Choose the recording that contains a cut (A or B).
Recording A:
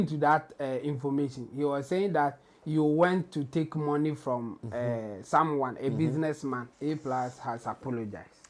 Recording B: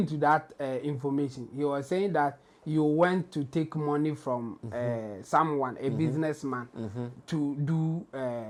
A